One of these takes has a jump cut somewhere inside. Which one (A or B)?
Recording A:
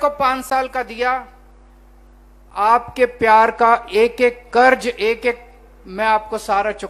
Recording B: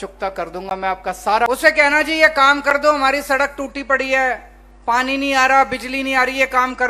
B